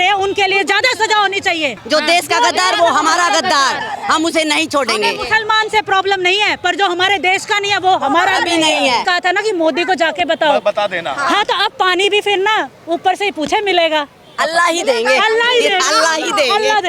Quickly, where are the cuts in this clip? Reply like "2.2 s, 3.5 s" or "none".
1.8 s, 9.0 s